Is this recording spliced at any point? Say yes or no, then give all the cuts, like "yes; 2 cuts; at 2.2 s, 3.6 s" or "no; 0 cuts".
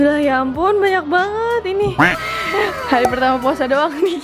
no; 0 cuts